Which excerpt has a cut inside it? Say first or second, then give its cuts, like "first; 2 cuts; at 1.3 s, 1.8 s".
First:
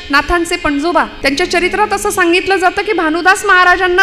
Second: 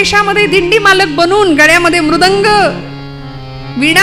first; 1 cut; at 1.1 s